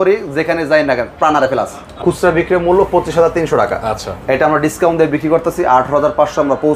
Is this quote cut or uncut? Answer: cut